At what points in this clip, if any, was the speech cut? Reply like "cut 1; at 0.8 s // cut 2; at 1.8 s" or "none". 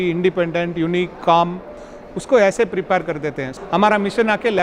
cut 1; at 3.5 s